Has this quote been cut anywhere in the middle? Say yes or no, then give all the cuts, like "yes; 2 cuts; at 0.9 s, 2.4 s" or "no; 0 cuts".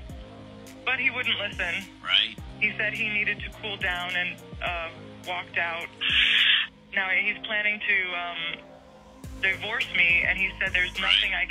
yes; 1 cut; at 6.6 s